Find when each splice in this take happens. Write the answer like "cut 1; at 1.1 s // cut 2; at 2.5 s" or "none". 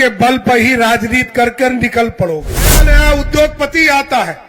cut 1; at 2.8 s